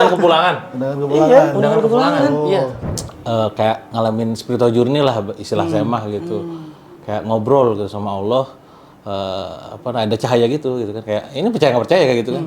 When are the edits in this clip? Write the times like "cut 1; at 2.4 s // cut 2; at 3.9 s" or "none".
cut 1; at 2.8 s

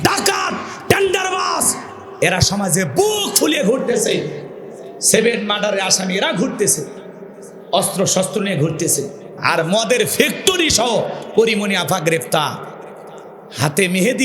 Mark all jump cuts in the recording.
cut 1; at 9.4 s

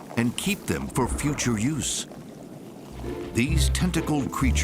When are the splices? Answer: cut 1; at 2.9 s

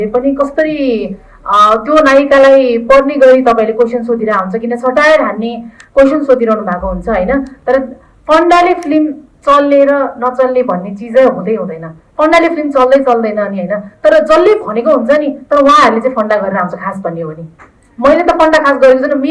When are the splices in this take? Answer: none

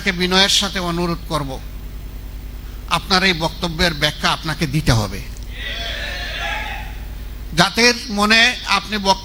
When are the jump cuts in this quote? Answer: none

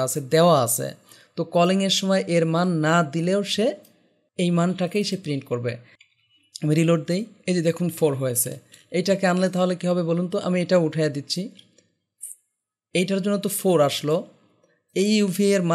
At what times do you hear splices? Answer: cut 1; at 5.9 s

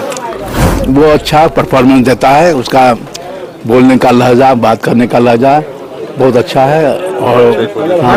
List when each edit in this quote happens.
none

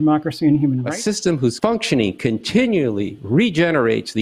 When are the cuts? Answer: cut 1; at 0.9 s

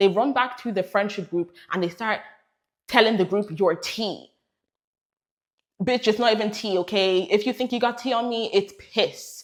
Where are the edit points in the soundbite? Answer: none

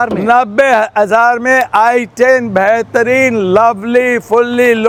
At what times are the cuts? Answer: none

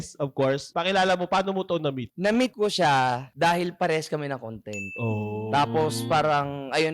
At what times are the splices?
none

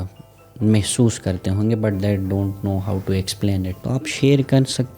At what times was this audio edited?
cut 1; at 3.8 s

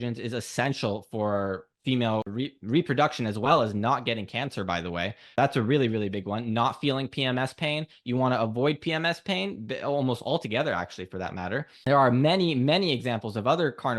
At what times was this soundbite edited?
cut 1; at 2.3 s // cut 2; at 5.4 s // cut 3; at 11.7 s

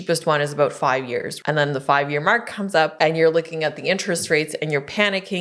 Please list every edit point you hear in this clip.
cut 1; at 1.3 s // cut 2; at 2.9 s

